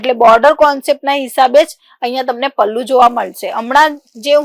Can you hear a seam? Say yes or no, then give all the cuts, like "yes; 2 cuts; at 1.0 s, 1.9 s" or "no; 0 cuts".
no; 0 cuts